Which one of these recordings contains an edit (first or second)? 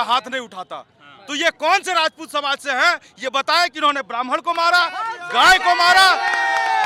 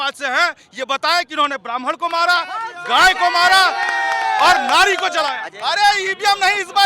second